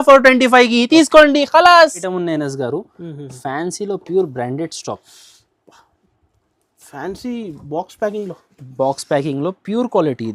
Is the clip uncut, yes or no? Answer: no